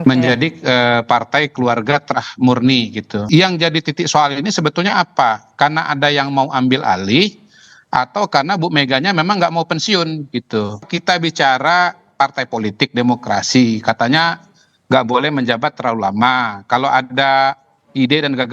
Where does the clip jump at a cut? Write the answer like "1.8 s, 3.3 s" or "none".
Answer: 3.2 s, 10.9 s